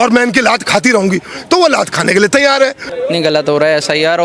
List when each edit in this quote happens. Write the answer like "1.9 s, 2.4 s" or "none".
2.9 s

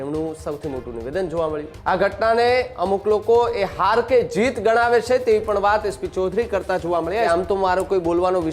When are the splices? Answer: 1.7 s, 7.3 s

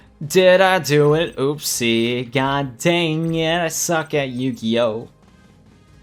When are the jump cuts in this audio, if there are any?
none

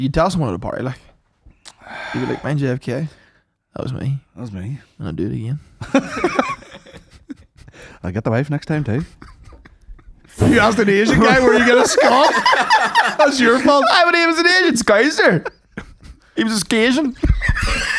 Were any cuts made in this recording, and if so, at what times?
10.5 s

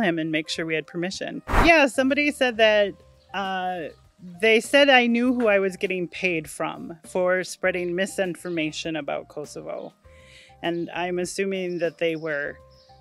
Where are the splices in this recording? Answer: 1.6 s

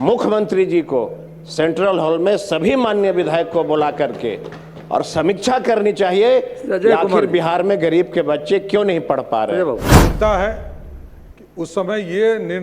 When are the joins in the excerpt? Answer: 9.9 s

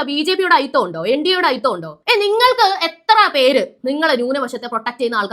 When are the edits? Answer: 1.9 s

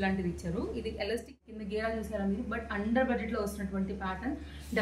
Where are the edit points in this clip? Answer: 1.4 s

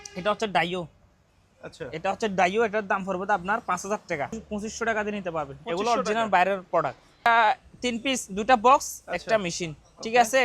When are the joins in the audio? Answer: 4.4 s, 7.3 s

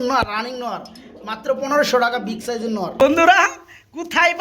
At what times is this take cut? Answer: 3.0 s

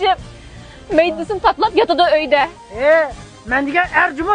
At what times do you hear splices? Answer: 2.6 s

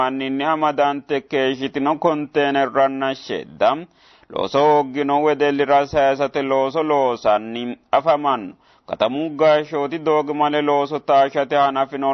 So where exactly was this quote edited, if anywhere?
none

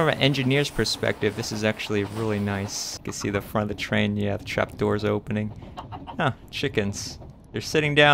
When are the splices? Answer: 3.0 s

